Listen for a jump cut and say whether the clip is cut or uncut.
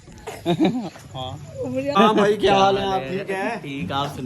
cut